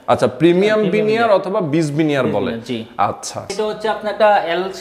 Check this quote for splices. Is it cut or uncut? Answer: cut